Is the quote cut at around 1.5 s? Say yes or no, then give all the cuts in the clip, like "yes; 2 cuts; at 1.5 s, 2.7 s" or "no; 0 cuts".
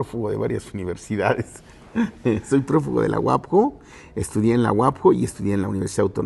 no; 0 cuts